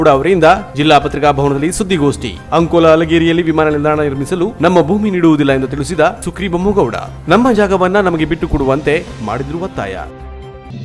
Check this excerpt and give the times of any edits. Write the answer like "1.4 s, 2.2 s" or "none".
none